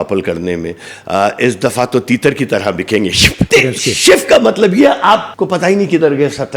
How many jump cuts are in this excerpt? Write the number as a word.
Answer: two